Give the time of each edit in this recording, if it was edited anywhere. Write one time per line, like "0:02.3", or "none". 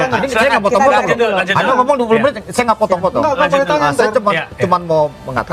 none